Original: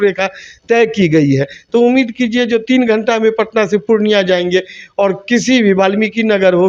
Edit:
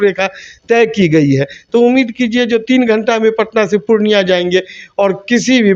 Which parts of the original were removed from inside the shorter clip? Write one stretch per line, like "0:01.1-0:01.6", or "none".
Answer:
none